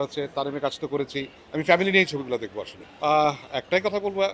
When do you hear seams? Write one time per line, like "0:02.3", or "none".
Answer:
0:01.3
0:02.7